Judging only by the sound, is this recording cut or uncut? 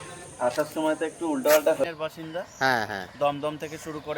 cut